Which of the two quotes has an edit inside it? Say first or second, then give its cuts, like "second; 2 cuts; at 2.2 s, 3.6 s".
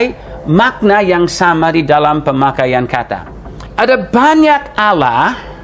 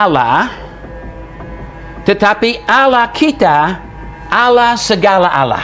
first; 1 cut; at 3.8 s